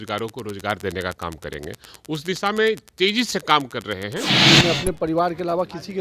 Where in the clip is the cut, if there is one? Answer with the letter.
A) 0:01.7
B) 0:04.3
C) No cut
B